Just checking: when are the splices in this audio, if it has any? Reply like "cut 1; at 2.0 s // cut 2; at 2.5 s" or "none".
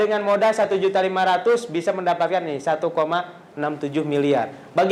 none